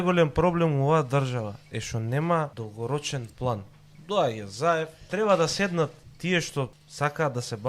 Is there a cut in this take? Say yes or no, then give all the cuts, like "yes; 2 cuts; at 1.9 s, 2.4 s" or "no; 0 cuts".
yes; 3 cuts; at 2.6 s, 5.1 s, 6.3 s